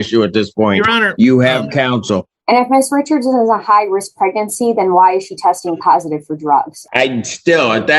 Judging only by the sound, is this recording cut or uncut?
cut